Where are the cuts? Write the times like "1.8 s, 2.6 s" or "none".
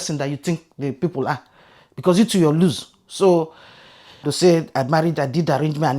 4.3 s

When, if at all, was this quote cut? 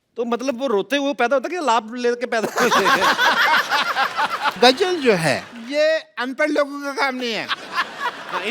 4.5 s

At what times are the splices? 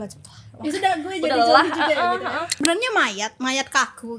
2.6 s

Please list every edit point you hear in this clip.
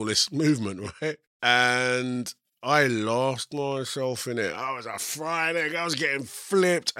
1.3 s

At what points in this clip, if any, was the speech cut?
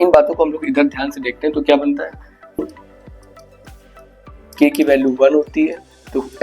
2.6 s

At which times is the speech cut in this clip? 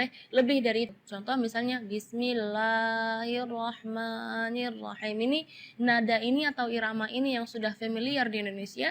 1.1 s

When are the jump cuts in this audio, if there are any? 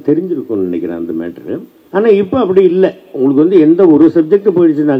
1.8 s

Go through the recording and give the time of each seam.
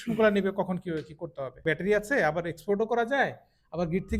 1.6 s

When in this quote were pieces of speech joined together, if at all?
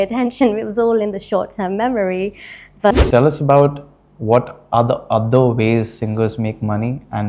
2.9 s

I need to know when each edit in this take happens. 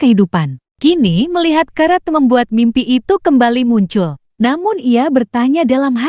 none

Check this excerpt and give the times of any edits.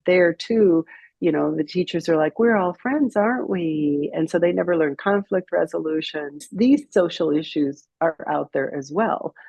6.5 s

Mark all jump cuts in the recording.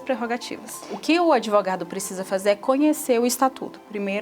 0.9 s

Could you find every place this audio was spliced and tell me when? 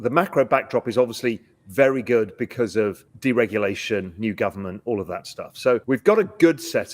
3.1 s, 5.8 s

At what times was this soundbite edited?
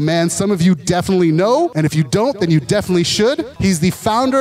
1.7 s, 3.5 s

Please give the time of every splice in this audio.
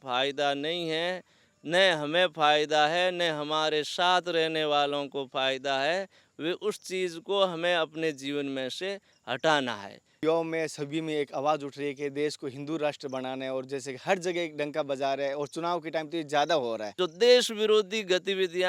10.2 s, 16.9 s

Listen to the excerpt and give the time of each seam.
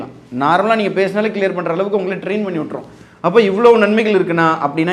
none

